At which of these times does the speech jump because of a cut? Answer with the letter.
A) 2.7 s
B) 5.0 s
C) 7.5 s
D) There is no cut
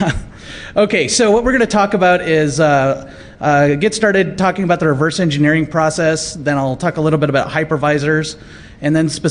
B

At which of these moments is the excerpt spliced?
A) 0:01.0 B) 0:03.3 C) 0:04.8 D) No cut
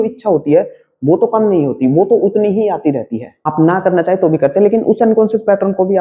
B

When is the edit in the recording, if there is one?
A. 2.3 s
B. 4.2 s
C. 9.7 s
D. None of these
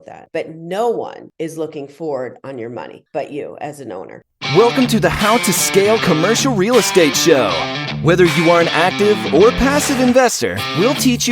B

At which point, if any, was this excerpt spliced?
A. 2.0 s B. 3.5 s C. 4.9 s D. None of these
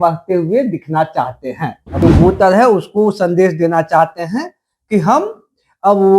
A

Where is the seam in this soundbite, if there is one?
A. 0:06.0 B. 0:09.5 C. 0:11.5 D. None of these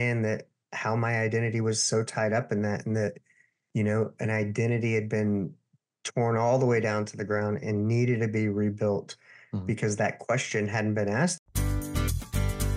C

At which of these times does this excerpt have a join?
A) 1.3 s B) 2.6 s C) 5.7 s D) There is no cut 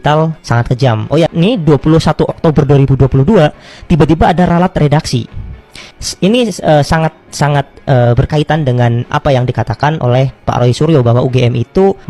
A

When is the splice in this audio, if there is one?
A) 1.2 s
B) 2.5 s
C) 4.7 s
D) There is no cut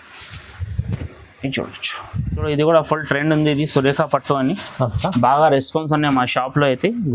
B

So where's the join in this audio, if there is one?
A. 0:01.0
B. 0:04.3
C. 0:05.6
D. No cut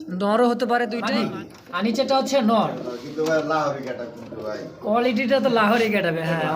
A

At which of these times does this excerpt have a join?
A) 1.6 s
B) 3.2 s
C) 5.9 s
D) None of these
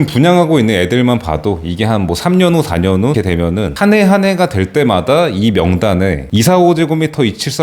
B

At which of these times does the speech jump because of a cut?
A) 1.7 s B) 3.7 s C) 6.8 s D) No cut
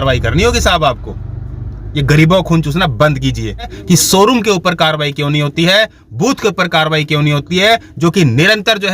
B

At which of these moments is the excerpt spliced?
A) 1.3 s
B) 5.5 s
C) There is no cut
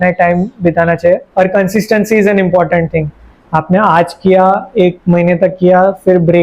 A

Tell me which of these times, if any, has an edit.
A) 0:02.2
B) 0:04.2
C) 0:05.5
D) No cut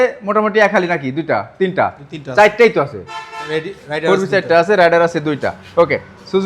D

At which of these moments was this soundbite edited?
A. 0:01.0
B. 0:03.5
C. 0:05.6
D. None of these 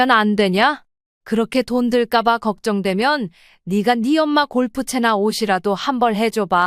D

